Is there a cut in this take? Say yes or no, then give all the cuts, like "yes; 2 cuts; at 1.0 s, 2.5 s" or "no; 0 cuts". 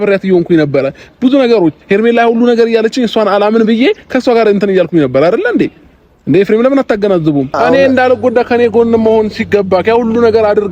yes; 1 cut; at 7.6 s